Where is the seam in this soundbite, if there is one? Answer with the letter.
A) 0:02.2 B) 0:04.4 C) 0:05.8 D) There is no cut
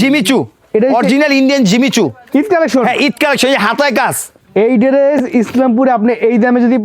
B